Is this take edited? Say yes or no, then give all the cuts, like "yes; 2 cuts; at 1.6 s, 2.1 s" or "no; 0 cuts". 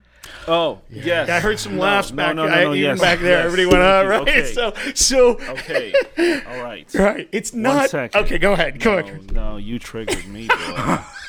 no; 0 cuts